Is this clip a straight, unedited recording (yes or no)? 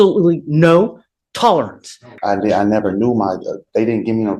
no